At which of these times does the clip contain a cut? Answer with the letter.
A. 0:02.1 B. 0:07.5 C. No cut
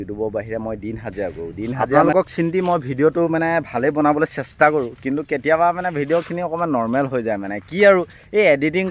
A